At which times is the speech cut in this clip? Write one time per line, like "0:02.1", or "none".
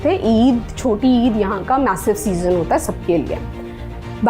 none